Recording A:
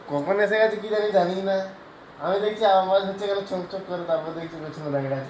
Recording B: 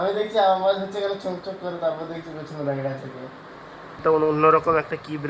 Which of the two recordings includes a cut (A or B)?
B